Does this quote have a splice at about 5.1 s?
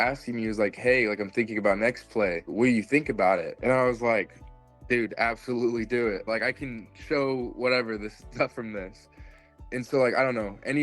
no; 1 cut; at 9.5 s

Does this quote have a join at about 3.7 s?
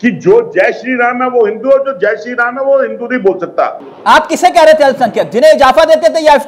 yes; 1 cut; at 3.7 s

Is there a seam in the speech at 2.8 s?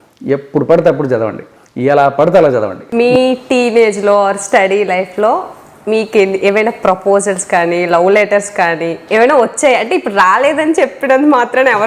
yes; 1 cut; at 2.8 s

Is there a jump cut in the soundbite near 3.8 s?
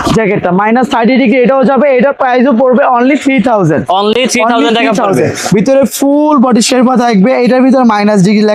no; 0 cuts

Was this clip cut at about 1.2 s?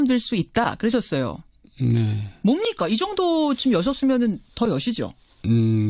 yes; 1 cut; at 1.2 s

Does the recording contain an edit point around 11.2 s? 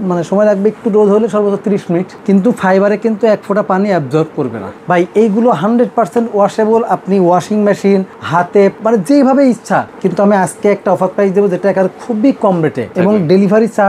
no; 5 cuts; at 2.1 s, 4.7 s, 8.5 s, 9.9 s, 12.9 s

